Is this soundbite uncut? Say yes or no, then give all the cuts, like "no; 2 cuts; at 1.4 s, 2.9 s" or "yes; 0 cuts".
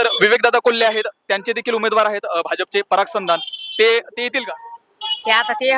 yes; 0 cuts